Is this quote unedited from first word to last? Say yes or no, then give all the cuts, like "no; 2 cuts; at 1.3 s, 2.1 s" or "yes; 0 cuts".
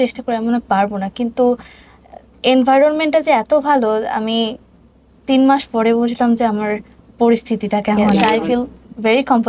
no; 1 cut; at 8.2 s